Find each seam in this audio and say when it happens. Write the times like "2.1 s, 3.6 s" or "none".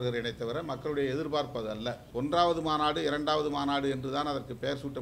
2.0 s